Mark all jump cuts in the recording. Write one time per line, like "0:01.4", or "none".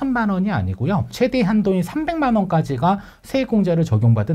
0:01.1